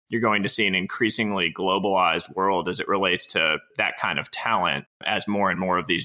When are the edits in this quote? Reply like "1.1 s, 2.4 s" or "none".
3.7 s, 5.0 s